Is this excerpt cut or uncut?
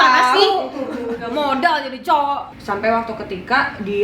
cut